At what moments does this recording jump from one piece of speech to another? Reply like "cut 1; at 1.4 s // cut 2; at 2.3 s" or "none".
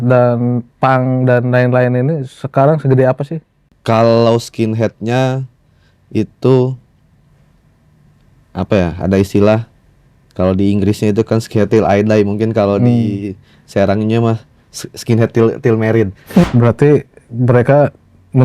cut 1; at 16.5 s